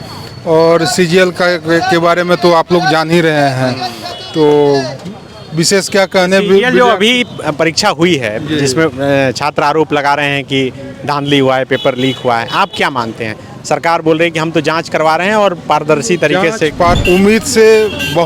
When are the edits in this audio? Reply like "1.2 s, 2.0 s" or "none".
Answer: 17.0 s